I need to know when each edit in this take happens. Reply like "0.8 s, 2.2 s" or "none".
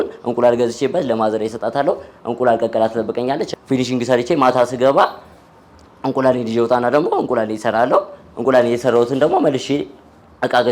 3.5 s